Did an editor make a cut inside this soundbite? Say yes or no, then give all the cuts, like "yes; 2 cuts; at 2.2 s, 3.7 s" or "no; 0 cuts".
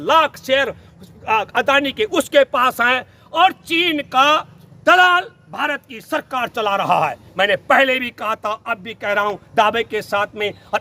no; 0 cuts